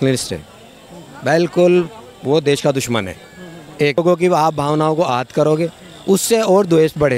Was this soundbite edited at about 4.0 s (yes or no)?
yes